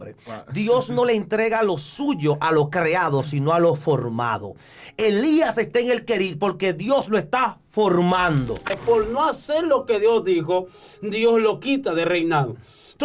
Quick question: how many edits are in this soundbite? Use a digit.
1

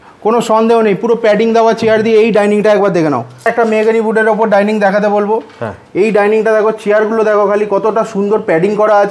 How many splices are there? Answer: 1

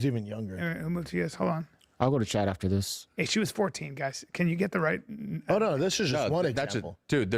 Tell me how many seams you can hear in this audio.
1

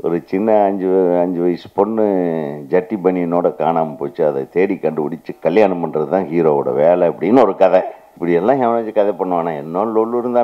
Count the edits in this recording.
1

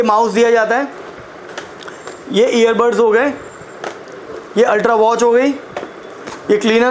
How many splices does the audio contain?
0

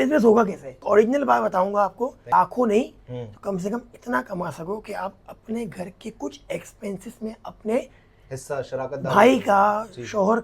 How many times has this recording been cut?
2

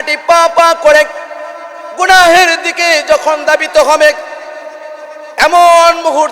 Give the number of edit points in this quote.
0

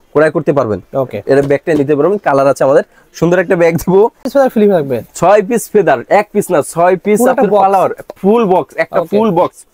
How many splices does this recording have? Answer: 1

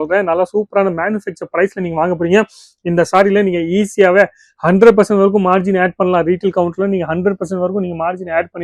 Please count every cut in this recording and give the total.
0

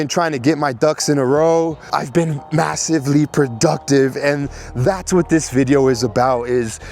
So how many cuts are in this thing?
1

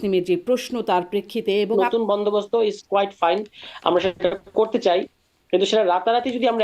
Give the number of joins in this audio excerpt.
1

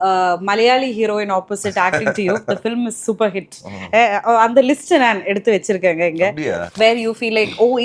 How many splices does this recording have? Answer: 1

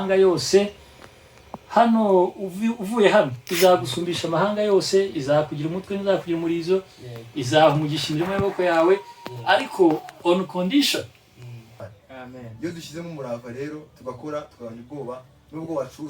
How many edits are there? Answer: 1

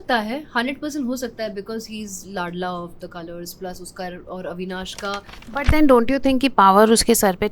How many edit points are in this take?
1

